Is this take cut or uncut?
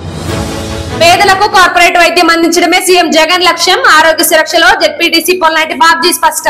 uncut